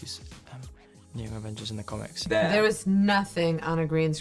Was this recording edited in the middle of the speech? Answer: yes; 1 cut; at 2.2 s

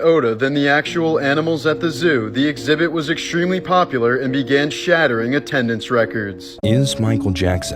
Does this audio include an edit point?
yes; 1 cut; at 6.5 s

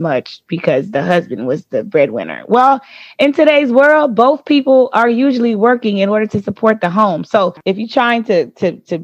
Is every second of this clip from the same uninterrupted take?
yes; 0 cuts

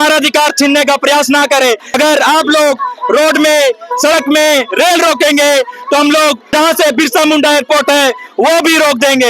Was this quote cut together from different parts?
yes; 2 cuts; at 1.9 s, 6.4 s

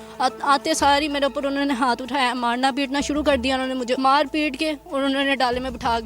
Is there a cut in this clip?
yes; 1 cut; at 4.0 s

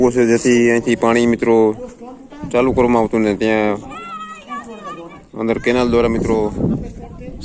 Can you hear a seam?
no; 0 cuts

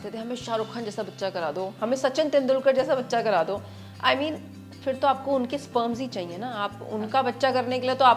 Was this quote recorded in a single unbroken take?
yes; 0 cuts

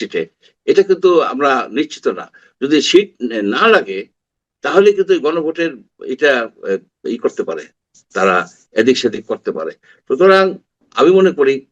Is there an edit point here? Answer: no; 0 cuts

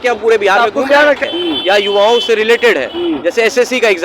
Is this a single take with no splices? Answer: no; 1 cut; at 1.2 s

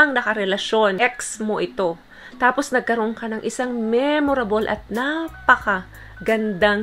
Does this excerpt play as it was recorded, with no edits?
no; 1 cut; at 1.0 s

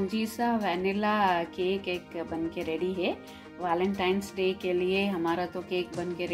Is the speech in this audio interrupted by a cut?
no; 0 cuts

